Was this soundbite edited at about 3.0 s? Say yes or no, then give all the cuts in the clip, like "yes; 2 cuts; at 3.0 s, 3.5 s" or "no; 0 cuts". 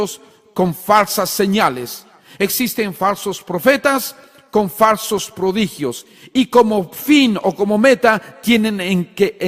yes; 1 cut; at 3.0 s